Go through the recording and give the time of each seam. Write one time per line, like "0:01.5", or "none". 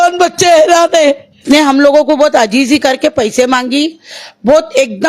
0:01.4